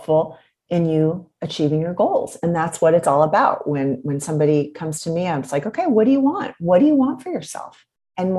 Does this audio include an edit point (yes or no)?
no